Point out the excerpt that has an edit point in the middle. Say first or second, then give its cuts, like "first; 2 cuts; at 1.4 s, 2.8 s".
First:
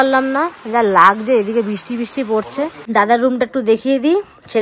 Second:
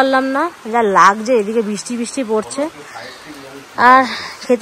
first; 1 cut; at 2.8 s